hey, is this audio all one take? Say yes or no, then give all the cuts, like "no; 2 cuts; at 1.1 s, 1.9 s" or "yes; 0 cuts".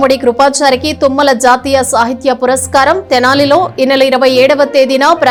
yes; 0 cuts